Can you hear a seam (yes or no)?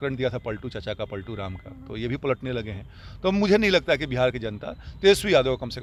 no